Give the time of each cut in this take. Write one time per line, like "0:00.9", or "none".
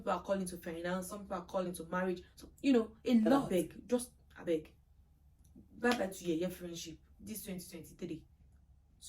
0:03.5

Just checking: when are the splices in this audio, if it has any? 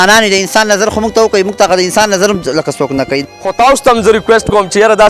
0:03.3

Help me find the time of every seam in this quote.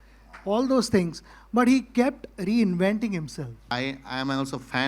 0:03.6

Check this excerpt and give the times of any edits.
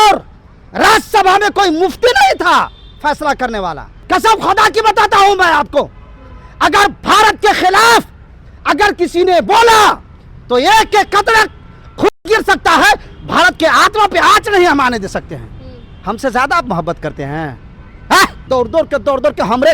0:04.0
0:18.5

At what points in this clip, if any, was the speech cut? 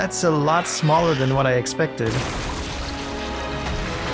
none

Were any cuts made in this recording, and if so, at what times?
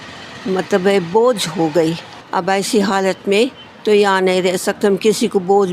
0:02.1

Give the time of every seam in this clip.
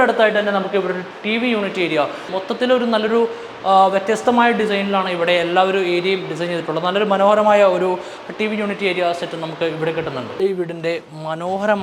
0:02.3
0:10.4

